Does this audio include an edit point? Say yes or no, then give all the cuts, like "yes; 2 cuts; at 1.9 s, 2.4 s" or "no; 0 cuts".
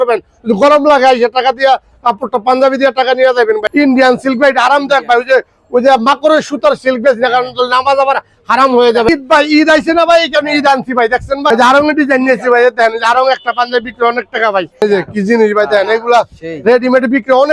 yes; 4 cuts; at 3.7 s, 9.1 s, 11.5 s, 14.8 s